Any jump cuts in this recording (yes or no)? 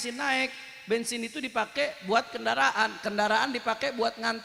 no